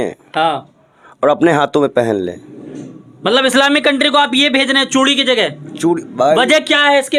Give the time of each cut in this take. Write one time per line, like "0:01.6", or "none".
none